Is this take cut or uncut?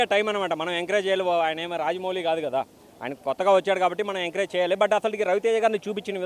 uncut